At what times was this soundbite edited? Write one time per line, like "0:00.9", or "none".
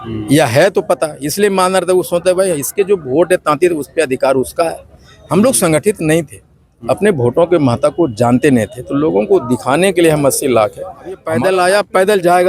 0:11.3